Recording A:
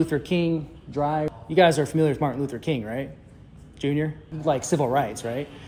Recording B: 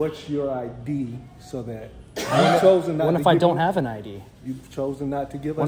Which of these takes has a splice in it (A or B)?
A